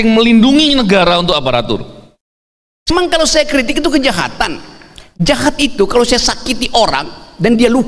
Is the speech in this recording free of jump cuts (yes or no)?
no